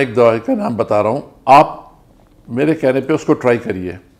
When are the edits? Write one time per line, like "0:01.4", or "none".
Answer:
0:01.3